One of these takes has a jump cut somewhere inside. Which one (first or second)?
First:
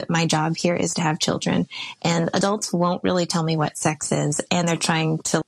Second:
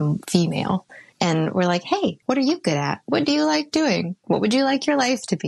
second